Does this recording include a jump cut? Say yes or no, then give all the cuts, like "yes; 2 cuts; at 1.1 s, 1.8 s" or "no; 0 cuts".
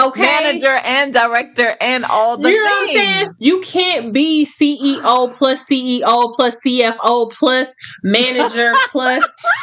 yes; 1 cut; at 3.3 s